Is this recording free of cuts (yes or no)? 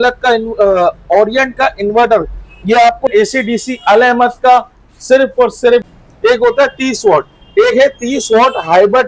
no